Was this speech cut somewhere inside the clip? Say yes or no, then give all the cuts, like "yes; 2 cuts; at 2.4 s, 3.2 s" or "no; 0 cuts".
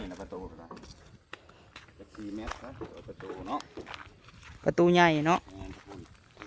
no; 0 cuts